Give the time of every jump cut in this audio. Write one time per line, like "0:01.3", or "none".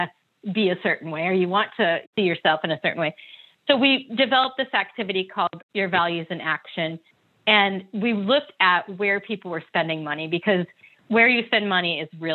0:02.1